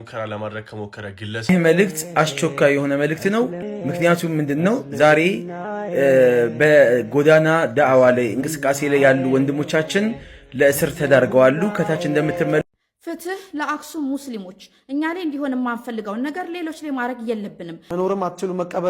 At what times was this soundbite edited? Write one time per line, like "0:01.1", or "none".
0:01.5
0:03.6
0:12.6
0:17.7